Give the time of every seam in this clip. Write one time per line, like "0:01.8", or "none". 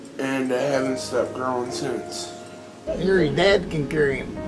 none